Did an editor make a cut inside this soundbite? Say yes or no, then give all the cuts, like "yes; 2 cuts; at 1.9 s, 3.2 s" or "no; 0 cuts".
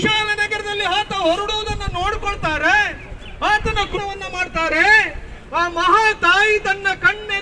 yes; 1 cut; at 3.9 s